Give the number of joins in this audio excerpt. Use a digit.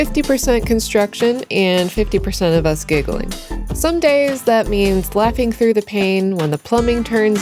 1